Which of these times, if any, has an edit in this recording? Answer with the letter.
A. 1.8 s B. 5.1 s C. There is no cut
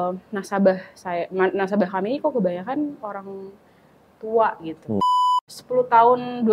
B